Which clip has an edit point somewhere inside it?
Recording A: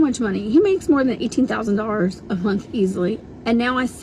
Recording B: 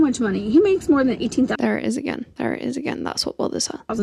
A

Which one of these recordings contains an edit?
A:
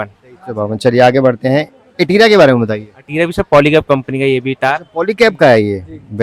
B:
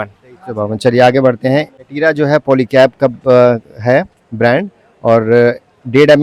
B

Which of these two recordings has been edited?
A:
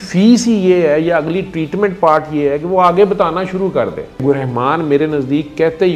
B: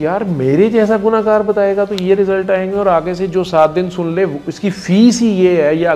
A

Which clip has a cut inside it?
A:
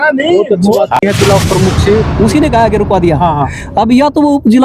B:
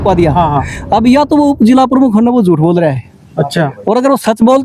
A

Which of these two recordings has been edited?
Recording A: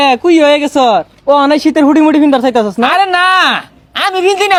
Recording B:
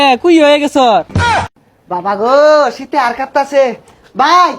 B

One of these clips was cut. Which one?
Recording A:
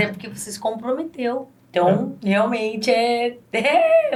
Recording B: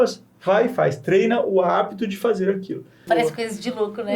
B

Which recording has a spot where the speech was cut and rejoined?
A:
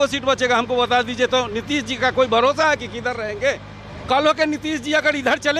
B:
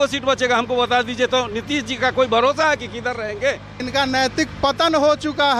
B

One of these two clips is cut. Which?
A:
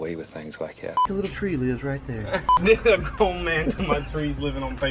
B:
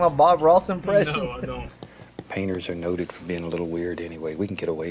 A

